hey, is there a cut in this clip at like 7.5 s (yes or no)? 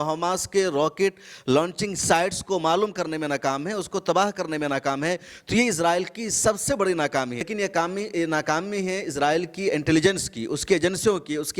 yes